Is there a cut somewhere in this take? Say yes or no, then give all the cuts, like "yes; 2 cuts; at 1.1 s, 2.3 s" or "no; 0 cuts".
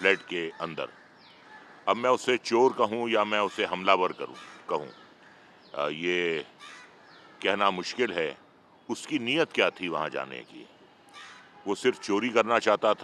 no; 0 cuts